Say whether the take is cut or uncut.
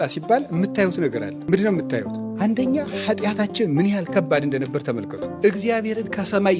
cut